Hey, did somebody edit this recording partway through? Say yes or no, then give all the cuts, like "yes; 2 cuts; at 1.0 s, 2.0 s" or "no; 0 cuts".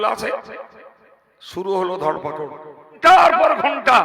yes; 1 cut; at 2.9 s